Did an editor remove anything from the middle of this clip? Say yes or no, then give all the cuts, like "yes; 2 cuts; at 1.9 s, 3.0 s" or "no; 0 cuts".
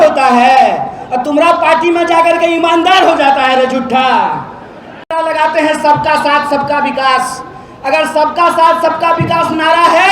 yes; 1 cut; at 5.1 s